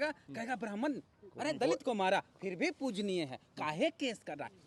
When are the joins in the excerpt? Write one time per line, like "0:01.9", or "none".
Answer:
none